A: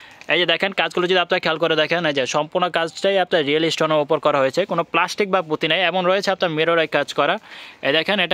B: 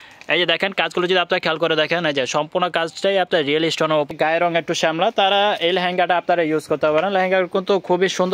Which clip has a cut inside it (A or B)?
B